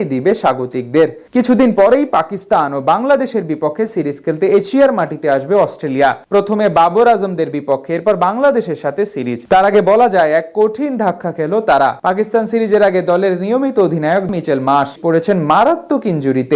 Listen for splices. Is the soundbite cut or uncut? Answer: uncut